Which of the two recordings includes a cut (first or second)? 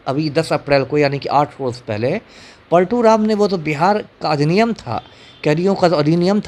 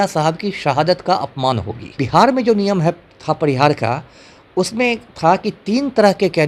second